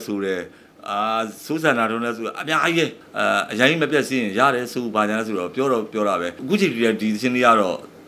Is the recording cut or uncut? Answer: cut